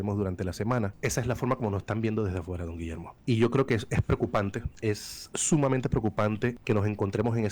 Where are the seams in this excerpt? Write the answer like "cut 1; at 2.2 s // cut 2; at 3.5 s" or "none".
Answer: cut 1; at 0.9 s // cut 2; at 3.1 s // cut 3; at 4.7 s // cut 4; at 6.6 s